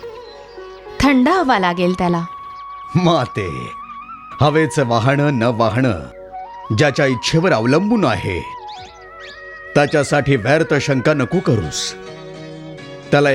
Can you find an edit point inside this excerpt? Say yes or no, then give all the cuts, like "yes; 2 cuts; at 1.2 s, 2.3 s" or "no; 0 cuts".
no; 0 cuts